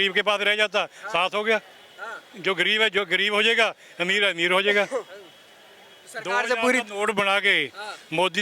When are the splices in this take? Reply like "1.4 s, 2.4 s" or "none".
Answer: none